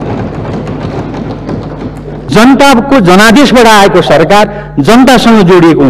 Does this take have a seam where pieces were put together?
yes; 1 cut; at 2.3 s

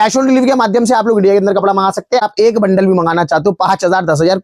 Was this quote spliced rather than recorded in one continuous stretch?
yes; 1 cut; at 2.2 s

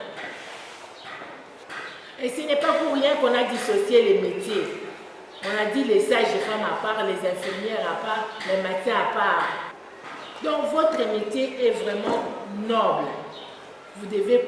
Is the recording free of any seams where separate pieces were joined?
no; 1 cut; at 1.6 s

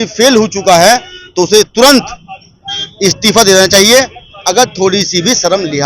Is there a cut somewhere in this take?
no; 0 cuts

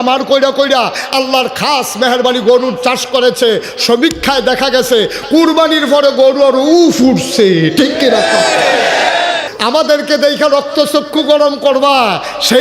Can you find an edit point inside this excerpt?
yes; 1 cut; at 9.5 s

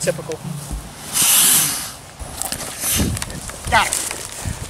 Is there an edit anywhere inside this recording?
yes; 1 cut; at 2.3 s

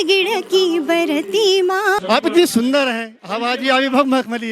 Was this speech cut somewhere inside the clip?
yes; 1 cut; at 2.0 s

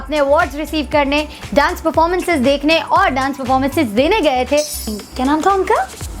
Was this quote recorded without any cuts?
no; 1 cut; at 4.9 s

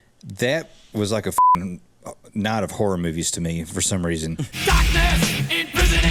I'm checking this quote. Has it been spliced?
yes; 1 cut; at 4.5 s

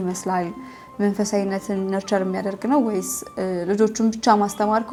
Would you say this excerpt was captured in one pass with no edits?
yes; 0 cuts

